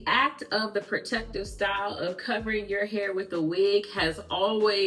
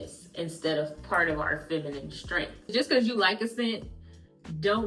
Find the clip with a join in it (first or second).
second